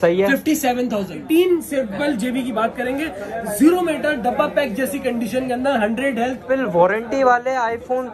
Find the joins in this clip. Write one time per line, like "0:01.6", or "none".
0:01.2
0:06.4